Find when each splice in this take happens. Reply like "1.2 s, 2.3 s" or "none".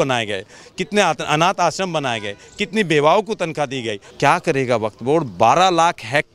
4.0 s